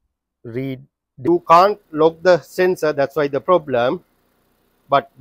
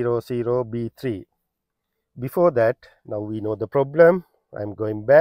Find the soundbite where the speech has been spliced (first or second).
first